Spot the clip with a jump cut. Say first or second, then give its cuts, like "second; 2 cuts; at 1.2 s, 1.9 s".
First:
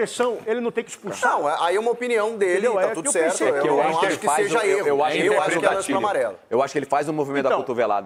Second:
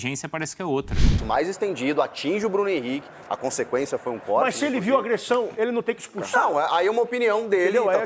second; 1 cut; at 1.2 s